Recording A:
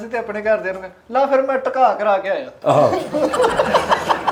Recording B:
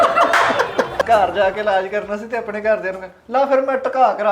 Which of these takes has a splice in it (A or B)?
B